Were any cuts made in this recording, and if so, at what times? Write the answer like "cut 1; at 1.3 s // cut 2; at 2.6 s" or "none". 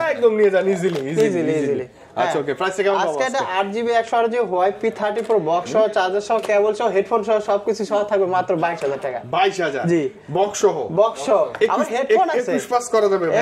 none

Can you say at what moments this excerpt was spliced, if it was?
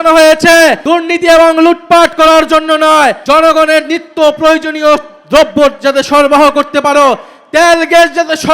cut 1; at 0.8 s // cut 2; at 3.2 s

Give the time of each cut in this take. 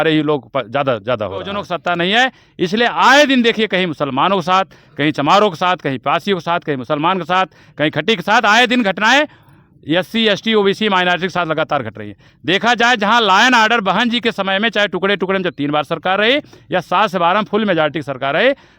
cut 1; at 1.6 s

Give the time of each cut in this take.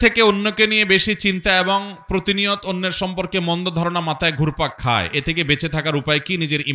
none

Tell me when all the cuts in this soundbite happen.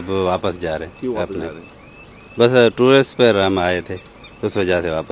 none

